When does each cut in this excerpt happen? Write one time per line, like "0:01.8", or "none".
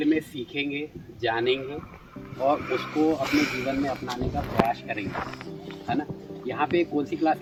none